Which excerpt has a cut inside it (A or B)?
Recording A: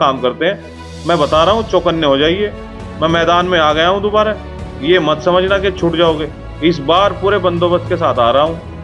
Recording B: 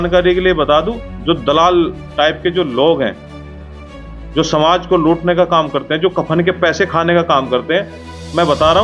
B